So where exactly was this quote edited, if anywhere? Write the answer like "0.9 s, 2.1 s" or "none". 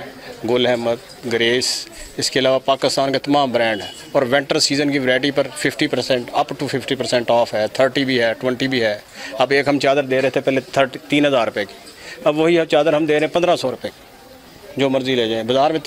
none